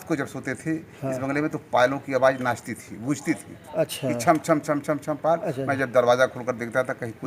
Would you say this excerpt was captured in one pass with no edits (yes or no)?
yes